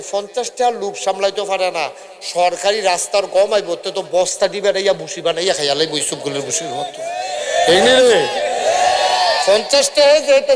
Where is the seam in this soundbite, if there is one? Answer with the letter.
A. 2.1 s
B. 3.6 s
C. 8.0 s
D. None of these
D